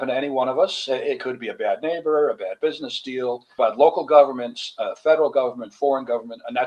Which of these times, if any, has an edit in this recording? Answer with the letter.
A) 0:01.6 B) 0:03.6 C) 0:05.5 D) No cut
B